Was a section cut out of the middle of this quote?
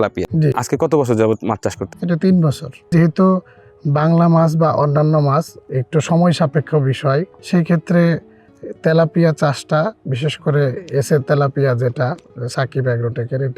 yes; 2 cuts; at 2.9 s, 7.4 s

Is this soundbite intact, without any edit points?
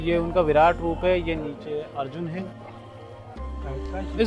yes; 0 cuts

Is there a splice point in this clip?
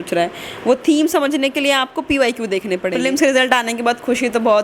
yes; 1 cut; at 3.0 s

